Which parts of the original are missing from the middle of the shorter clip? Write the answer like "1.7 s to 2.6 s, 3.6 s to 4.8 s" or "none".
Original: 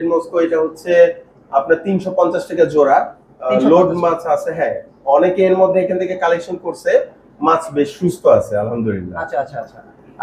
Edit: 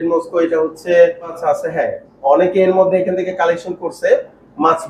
1.4 s to 4.2 s